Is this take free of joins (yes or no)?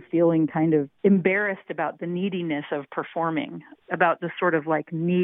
no